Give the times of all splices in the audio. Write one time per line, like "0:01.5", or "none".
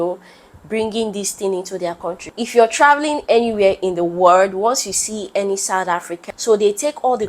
0:02.2
0:06.2